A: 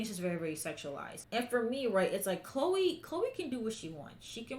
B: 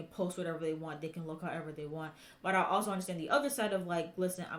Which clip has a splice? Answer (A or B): A